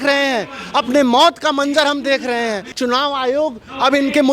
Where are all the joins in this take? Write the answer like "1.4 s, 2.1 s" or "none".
2.7 s